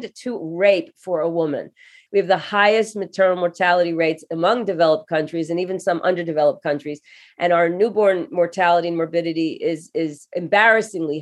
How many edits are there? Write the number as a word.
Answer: two